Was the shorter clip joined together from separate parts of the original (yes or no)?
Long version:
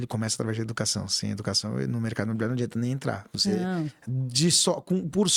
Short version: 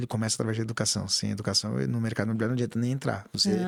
no